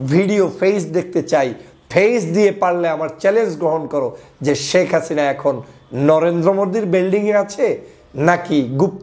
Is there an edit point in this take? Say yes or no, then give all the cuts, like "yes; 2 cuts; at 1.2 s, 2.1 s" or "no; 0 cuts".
no; 0 cuts